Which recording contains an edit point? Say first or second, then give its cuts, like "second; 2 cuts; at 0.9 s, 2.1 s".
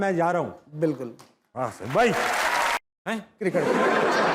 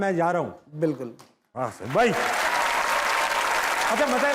first; 1 cut; at 2.8 s